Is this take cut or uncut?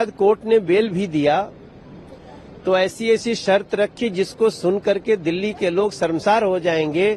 uncut